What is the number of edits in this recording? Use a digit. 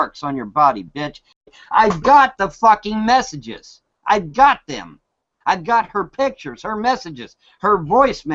1